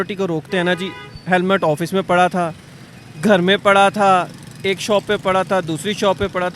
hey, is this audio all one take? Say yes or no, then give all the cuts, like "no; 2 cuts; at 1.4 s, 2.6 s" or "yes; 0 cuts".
yes; 0 cuts